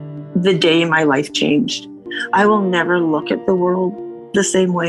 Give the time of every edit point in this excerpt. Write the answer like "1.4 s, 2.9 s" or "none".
none